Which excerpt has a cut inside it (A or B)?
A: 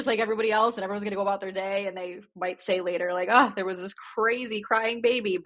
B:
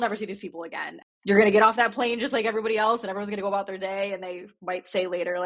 B